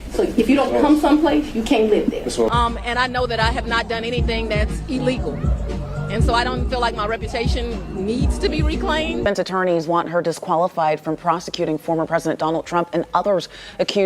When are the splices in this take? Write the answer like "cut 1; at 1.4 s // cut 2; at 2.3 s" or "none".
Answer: cut 1; at 2.5 s // cut 2; at 9.2 s

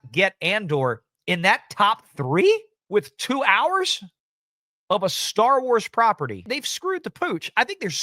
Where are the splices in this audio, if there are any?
cut 1; at 2.7 s

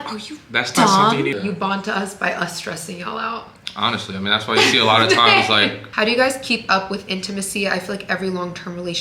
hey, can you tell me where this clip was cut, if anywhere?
cut 1; at 1.3 s // cut 2; at 5.8 s

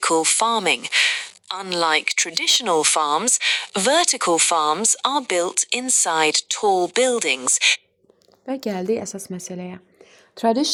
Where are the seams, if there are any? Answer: none

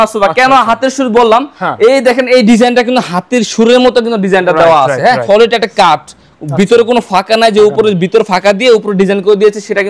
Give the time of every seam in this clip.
cut 1; at 5.0 s

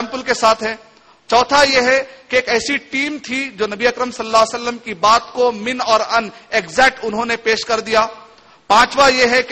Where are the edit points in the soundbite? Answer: none

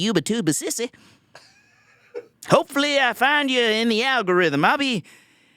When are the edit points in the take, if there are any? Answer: cut 1; at 2.4 s

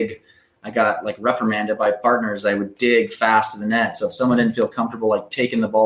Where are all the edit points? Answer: none

